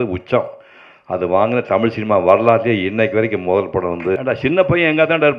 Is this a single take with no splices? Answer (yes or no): no